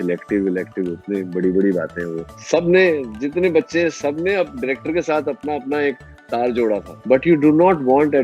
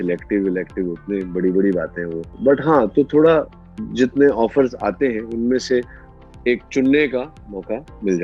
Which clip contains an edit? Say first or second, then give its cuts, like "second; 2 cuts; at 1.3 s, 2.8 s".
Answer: first; 2 cuts; at 2.2 s, 6.9 s